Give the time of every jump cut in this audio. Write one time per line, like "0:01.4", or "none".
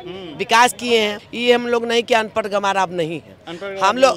0:01.3

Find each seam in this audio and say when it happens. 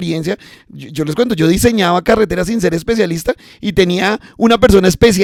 none

